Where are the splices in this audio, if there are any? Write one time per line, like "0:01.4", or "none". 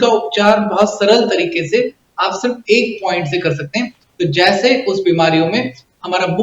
none